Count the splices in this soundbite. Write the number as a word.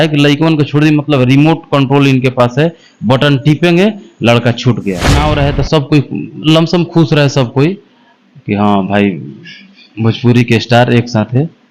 one